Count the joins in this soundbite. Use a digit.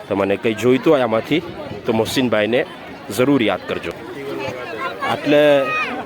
1